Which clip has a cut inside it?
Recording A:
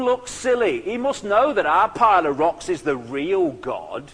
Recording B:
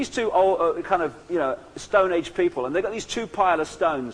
B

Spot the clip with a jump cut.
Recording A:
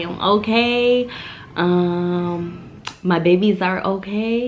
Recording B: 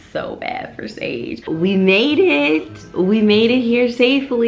B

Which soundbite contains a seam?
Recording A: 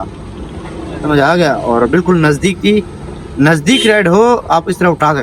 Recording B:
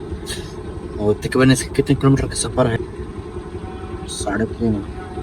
B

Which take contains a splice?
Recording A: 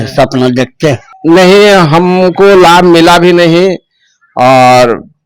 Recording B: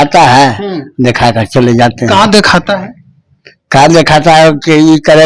A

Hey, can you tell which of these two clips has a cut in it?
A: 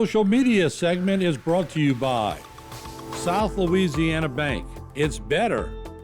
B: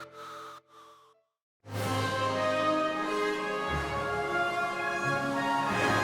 A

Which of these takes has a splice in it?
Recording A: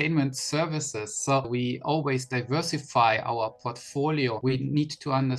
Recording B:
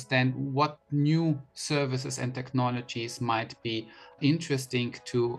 A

